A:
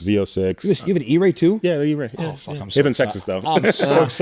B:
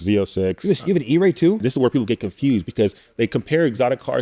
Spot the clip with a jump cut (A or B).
B